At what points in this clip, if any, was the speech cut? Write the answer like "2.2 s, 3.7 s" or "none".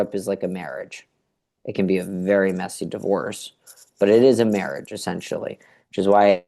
none